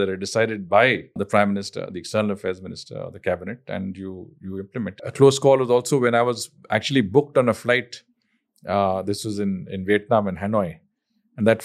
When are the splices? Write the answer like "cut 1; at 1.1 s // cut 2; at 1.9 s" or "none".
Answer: cut 1; at 1.2 s // cut 2; at 5.0 s